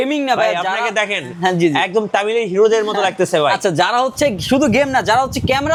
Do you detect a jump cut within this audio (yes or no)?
no